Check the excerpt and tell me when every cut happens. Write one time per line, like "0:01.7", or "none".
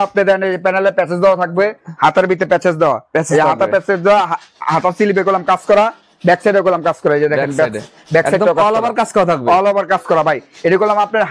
none